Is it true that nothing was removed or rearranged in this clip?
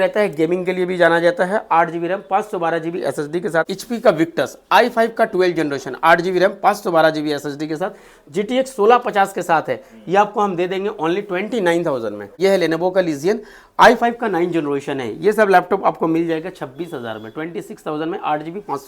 no; 2 cuts; at 3.8 s, 12.3 s

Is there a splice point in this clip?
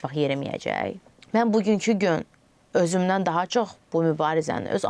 yes; 1 cut; at 1.1 s

